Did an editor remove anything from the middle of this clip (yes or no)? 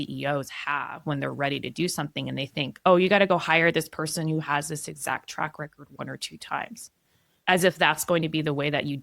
yes